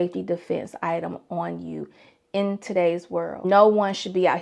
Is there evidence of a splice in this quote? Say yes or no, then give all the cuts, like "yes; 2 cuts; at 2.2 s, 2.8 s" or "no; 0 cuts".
yes; 1 cut; at 3.4 s